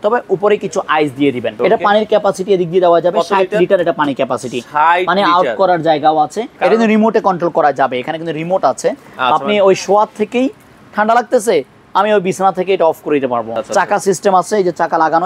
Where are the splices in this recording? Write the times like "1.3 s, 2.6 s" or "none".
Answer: 1.5 s, 6.4 s, 13.6 s